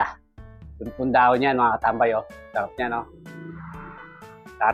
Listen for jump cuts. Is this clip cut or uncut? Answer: uncut